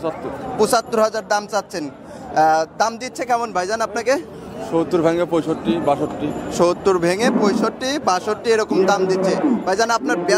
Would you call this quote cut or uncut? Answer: uncut